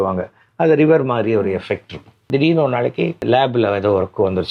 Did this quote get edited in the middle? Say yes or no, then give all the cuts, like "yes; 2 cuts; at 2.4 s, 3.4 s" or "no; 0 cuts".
yes; 2 cuts; at 2.3 s, 3.2 s